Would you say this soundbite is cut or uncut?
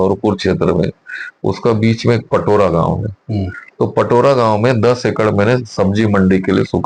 uncut